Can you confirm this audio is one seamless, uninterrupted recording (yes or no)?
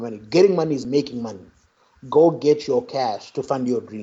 yes